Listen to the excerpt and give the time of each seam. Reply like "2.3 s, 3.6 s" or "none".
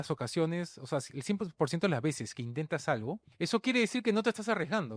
3.3 s